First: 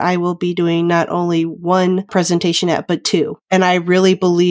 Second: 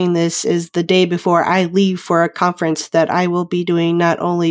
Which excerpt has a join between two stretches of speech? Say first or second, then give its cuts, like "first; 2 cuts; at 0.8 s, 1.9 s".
first; 1 cut; at 3.5 s